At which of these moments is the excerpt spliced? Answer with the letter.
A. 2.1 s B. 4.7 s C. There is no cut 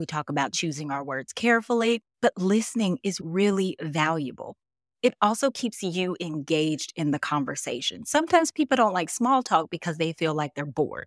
A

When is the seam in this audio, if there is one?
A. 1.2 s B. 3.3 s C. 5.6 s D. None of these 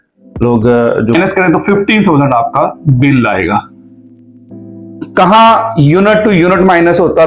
A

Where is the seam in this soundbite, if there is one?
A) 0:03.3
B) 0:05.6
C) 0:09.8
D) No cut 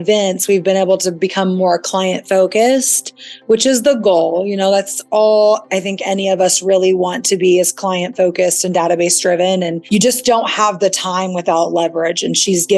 C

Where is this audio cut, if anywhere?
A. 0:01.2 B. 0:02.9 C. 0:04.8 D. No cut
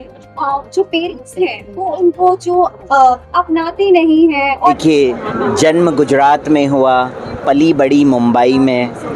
C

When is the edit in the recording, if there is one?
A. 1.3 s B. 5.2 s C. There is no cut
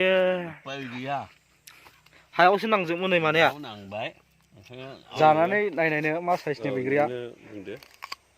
B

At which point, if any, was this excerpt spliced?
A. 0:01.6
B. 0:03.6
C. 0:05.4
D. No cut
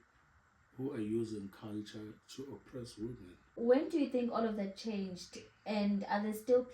B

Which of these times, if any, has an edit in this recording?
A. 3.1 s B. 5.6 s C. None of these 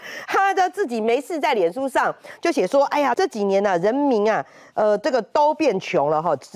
A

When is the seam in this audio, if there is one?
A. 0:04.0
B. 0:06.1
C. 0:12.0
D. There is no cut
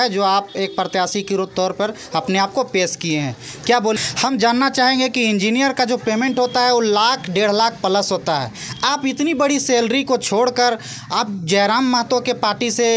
A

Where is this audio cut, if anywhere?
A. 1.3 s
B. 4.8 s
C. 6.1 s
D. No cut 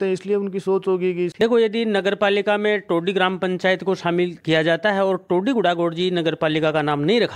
A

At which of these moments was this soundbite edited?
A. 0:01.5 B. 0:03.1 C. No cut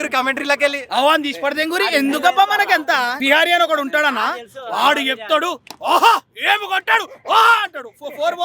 B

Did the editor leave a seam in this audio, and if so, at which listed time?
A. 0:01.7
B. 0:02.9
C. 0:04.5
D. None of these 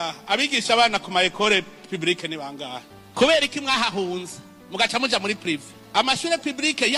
D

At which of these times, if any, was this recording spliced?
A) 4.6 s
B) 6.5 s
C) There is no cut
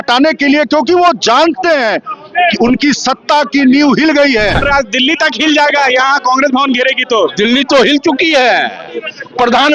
A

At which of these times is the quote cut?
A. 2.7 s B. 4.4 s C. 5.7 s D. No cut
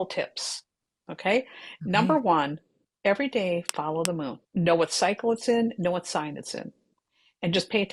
B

